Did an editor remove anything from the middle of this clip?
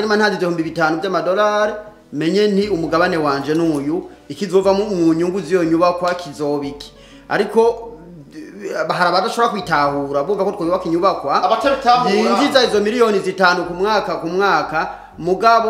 no; 0 cuts

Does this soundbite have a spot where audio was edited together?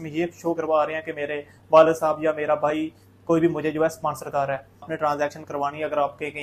yes; 1 cut; at 4.9 s

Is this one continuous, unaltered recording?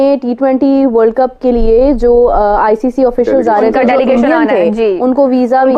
yes; 0 cuts

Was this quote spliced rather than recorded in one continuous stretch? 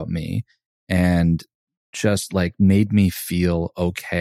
yes; 1 cut; at 1.8 s

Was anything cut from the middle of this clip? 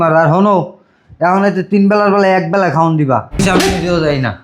yes; 1 cut; at 3.4 s

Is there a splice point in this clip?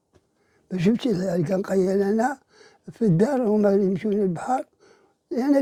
no; 0 cuts

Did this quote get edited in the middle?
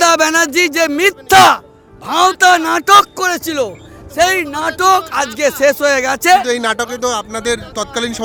no; 0 cuts

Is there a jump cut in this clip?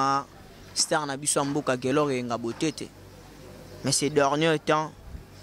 no; 0 cuts

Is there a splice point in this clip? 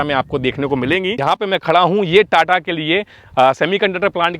yes; 1 cut; at 1.1 s

